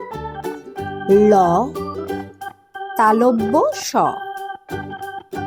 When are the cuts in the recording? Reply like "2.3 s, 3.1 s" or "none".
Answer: none